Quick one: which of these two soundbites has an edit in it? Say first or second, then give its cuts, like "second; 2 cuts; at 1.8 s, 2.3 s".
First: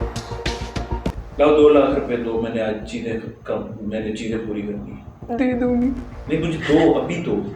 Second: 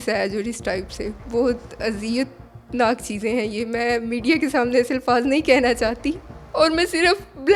first; 1 cut; at 1.2 s